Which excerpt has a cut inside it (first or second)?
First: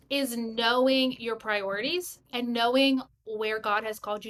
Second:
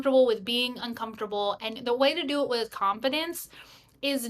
second